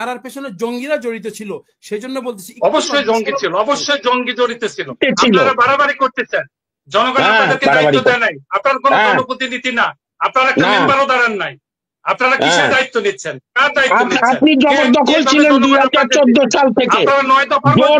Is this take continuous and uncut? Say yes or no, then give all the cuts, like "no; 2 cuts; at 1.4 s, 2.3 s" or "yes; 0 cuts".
no; 1 cut; at 5.0 s